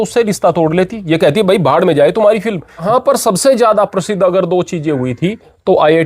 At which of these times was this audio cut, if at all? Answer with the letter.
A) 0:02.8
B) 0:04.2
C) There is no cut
A